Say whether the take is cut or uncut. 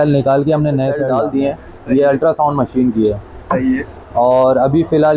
cut